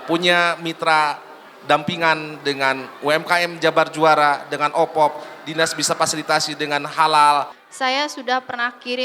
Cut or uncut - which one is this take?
cut